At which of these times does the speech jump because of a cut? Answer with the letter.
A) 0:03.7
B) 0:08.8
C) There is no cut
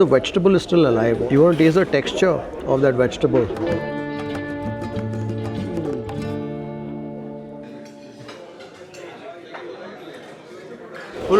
C